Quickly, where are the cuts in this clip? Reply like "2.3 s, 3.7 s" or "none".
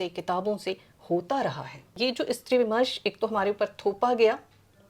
1.9 s